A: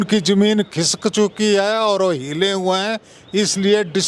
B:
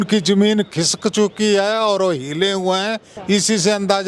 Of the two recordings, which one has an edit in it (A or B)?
B